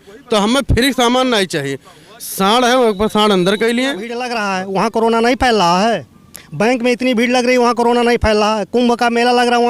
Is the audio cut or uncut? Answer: cut